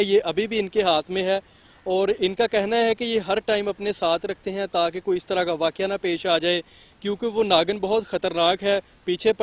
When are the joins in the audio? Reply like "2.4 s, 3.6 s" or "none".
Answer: none